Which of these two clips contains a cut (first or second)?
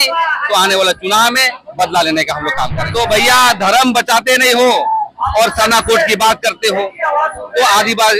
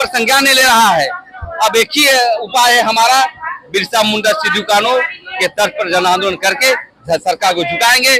first